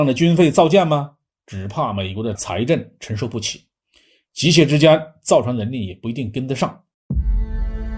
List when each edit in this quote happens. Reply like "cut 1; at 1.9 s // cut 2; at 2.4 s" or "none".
cut 1; at 6.9 s